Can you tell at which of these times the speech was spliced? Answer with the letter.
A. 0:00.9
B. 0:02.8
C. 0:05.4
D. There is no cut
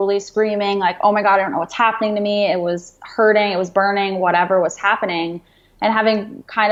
D